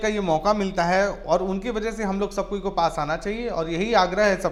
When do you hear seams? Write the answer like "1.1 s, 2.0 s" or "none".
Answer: none

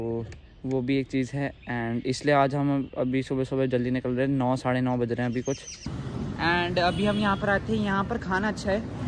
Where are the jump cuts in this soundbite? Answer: 6.0 s

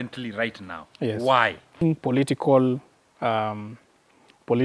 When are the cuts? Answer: 1.8 s

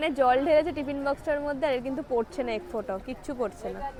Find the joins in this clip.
none

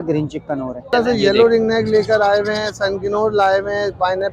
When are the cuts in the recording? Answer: 0.9 s

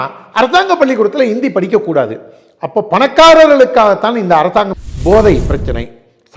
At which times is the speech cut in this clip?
4.8 s

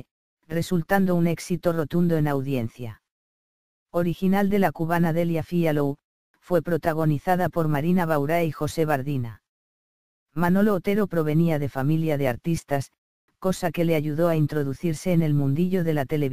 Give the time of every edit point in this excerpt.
11.1 s

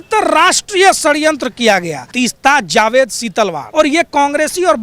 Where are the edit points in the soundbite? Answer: 2.0 s, 3.6 s

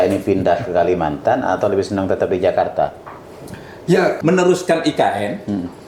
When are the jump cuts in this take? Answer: 4.2 s

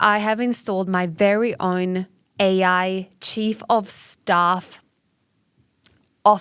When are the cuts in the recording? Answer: none

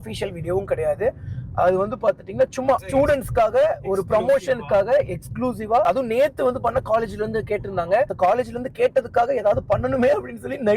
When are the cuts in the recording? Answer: 2.9 s, 5.8 s

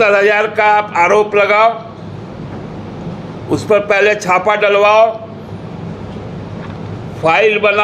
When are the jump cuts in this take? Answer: none

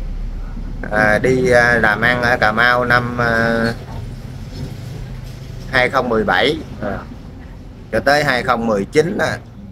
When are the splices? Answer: none

